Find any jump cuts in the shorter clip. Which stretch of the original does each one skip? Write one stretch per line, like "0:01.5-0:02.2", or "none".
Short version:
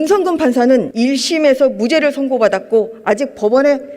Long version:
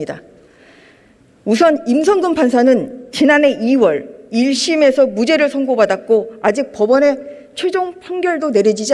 0:02.9-0:04.3